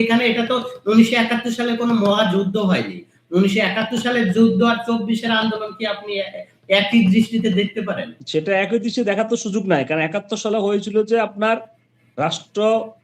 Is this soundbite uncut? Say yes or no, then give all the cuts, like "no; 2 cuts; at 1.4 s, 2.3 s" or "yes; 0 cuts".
no; 1 cut; at 8.1 s